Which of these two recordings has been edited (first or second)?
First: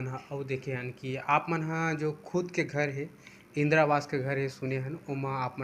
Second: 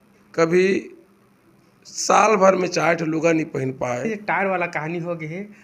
second